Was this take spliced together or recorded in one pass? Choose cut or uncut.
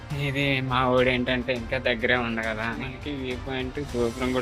cut